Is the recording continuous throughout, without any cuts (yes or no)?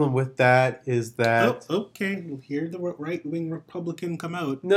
yes